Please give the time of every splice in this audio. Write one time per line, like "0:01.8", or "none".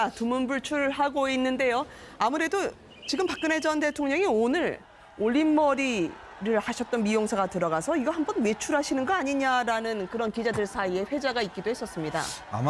0:05.2